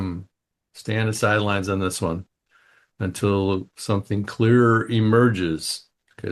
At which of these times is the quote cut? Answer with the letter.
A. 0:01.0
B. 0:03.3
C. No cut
A